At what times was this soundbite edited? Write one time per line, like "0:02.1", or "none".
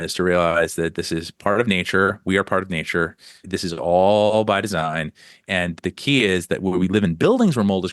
0:03.4
0:05.8